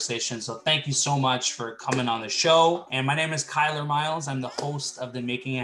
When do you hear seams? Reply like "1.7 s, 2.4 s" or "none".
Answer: 2.9 s